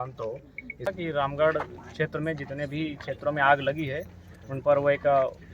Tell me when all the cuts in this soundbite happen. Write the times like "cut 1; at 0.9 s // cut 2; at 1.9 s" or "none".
cut 1; at 0.9 s